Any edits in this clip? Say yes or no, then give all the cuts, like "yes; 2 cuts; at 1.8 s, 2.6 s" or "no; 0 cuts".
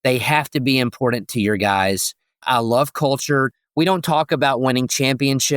yes; 2 cuts; at 2.4 s, 3.6 s